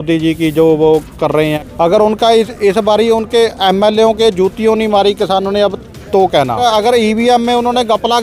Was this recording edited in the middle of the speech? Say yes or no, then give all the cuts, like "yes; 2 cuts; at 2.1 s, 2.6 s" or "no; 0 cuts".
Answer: yes; 2 cuts; at 1.6 s, 6.6 s